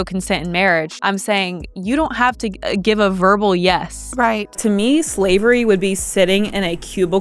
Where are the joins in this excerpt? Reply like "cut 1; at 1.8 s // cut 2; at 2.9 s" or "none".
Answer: cut 1; at 0.9 s // cut 2; at 2.5 s // cut 3; at 4.6 s